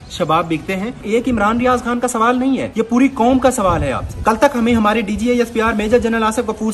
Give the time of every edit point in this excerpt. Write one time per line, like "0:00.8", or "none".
0:01.0
0:02.7
0:04.1